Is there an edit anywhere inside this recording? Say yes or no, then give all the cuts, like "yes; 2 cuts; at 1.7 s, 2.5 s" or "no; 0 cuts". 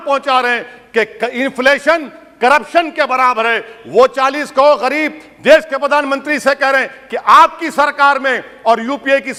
no; 0 cuts